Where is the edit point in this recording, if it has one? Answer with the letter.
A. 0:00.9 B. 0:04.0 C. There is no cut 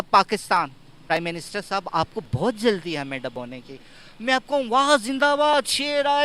A